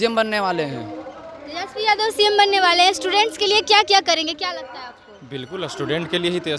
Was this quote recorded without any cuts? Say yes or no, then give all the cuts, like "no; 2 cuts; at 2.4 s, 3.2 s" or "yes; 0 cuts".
yes; 0 cuts